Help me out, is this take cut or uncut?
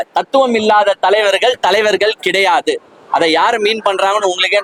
uncut